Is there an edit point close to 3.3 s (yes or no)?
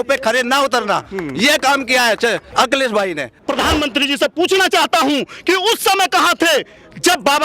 yes